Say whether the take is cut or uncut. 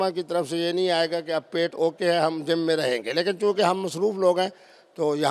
uncut